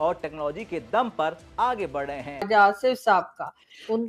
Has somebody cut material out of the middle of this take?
yes; 1 cut; at 2.4 s

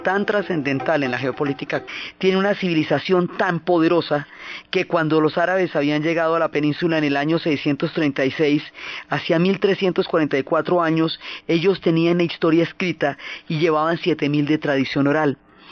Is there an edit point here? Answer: no; 0 cuts

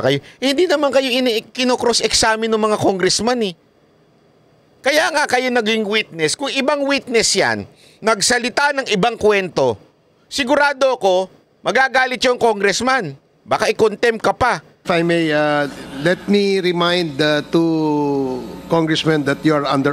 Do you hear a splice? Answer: yes; 1 cut; at 14.9 s

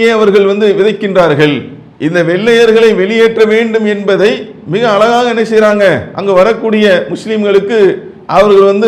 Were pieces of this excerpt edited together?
no; 0 cuts

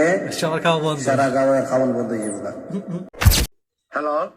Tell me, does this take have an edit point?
yes; 1 cut; at 3.2 s

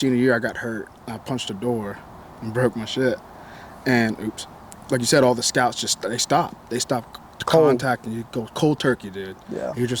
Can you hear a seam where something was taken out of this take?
yes; 1 cut; at 1.0 s

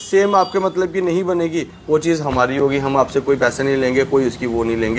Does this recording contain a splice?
no; 0 cuts

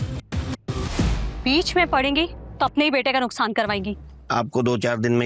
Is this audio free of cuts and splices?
no; 1 cut; at 4.2 s

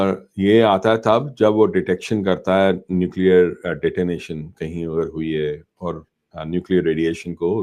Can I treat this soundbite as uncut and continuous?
yes; 0 cuts

